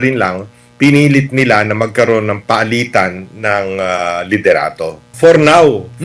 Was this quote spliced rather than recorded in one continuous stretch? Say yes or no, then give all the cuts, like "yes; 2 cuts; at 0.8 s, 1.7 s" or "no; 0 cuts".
yes; 1 cut; at 5.1 s